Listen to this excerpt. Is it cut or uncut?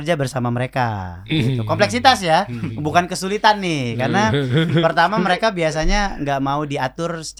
uncut